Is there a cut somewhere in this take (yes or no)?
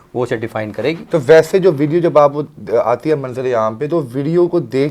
no